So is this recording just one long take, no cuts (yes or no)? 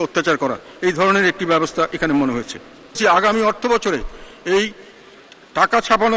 no